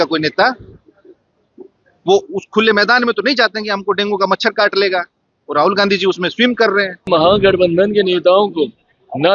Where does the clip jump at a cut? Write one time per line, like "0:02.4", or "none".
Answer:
0:07.1